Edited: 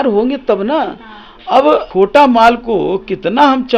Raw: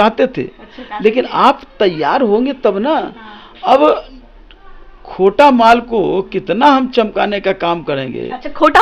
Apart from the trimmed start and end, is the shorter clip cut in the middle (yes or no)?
yes